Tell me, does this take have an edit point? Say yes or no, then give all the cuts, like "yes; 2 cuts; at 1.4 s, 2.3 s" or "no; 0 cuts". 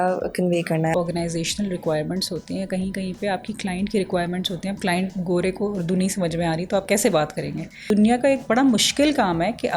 yes; 2 cuts; at 0.9 s, 7.9 s